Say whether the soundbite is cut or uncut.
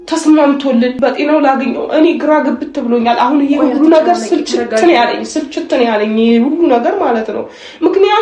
cut